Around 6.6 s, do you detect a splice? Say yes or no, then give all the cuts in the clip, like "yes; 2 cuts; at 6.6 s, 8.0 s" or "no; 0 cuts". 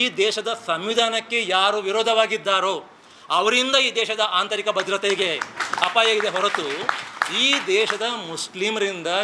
no; 0 cuts